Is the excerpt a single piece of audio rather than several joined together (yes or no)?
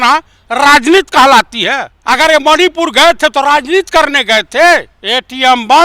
no